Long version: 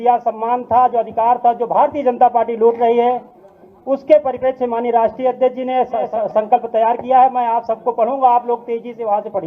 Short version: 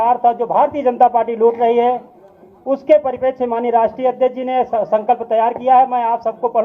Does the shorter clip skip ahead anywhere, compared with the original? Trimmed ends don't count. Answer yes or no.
yes